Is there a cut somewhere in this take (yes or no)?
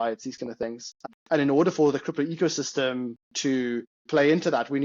yes